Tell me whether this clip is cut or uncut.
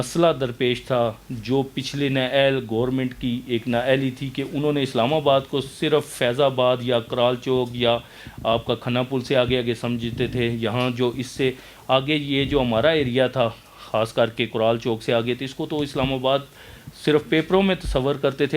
uncut